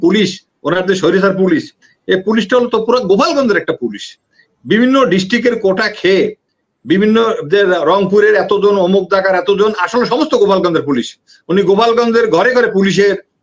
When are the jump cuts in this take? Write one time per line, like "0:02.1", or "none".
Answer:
none